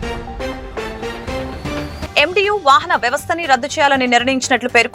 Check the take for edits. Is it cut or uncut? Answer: uncut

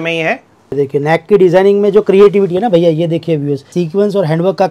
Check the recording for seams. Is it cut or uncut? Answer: cut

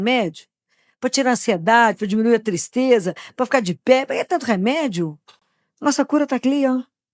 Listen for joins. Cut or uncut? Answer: uncut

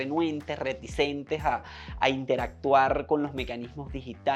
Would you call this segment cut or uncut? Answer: uncut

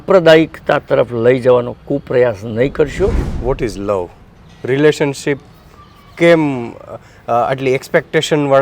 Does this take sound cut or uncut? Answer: cut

